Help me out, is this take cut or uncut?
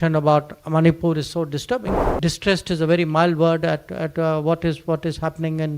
cut